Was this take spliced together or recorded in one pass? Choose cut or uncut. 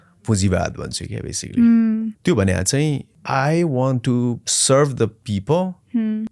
cut